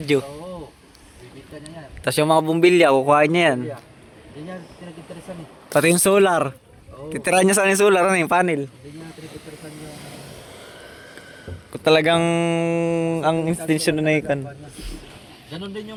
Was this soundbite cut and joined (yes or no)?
no